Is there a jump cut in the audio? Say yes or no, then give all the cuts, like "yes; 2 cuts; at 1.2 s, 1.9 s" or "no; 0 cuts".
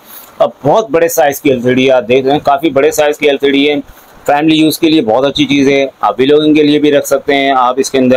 no; 0 cuts